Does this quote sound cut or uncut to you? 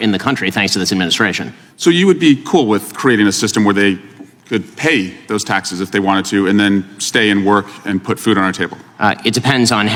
uncut